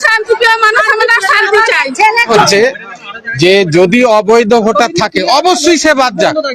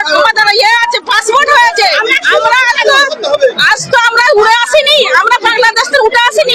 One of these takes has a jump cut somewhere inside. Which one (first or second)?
first